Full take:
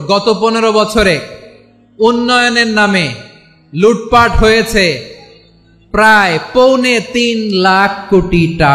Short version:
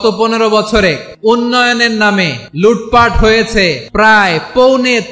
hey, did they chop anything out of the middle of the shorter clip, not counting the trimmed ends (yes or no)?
yes